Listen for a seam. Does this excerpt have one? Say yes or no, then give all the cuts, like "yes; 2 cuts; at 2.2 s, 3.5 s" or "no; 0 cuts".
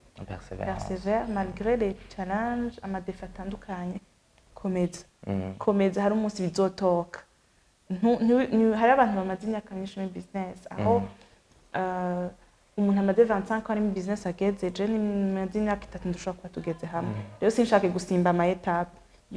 no; 0 cuts